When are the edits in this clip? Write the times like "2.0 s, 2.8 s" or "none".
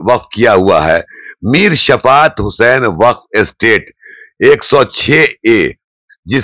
none